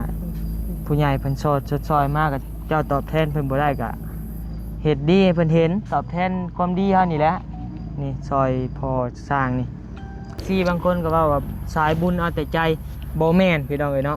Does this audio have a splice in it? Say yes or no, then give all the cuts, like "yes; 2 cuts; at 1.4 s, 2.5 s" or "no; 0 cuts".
yes; 1 cut; at 10.4 s